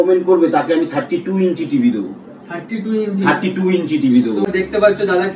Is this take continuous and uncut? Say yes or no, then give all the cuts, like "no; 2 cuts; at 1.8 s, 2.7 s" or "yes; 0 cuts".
no; 1 cut; at 4.4 s